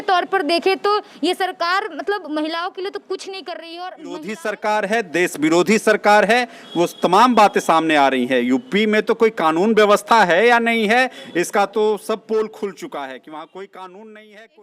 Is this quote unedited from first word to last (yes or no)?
no